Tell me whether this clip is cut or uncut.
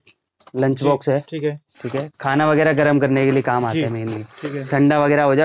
uncut